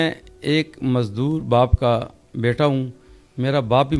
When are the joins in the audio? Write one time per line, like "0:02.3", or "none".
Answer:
none